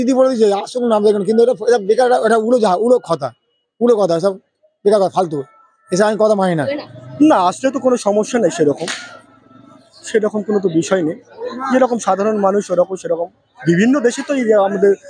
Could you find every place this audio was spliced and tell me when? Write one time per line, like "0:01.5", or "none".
0:06.7